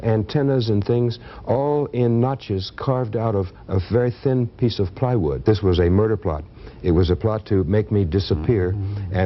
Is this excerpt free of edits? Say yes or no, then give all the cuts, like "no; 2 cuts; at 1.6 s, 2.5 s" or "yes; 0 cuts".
no; 1 cut; at 5.4 s